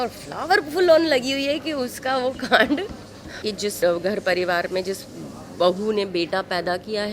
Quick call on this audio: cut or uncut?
cut